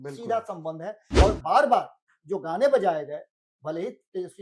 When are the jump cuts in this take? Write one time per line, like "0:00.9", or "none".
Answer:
0:01.2